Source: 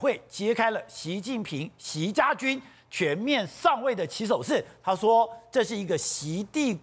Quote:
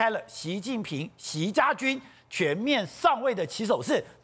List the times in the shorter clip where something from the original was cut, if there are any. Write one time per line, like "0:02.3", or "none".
none